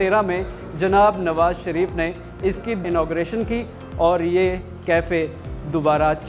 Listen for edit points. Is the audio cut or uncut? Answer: cut